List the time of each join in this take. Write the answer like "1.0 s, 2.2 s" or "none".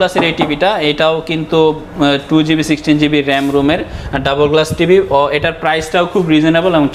none